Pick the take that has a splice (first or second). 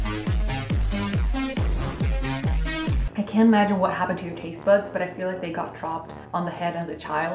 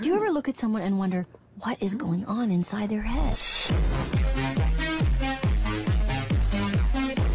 first